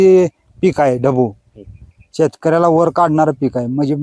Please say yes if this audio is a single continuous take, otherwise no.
yes